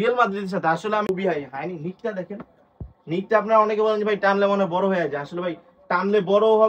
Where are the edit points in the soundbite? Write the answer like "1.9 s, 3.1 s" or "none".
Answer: 1.0 s